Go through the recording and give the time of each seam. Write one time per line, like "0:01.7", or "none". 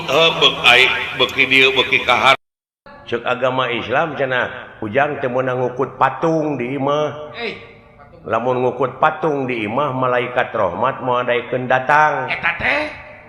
0:02.4